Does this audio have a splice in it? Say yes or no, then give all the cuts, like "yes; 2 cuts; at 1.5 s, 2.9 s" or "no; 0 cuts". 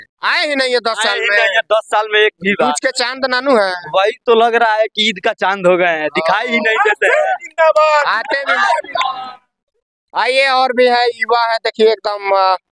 no; 0 cuts